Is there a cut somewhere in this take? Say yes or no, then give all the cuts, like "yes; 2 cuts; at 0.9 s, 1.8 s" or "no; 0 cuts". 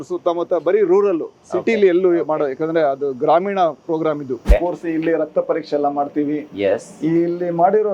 yes; 1 cut; at 4.4 s